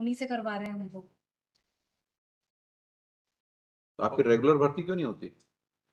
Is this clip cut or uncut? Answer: uncut